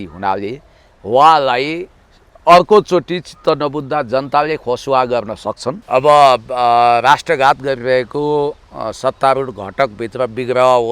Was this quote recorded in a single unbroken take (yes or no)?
no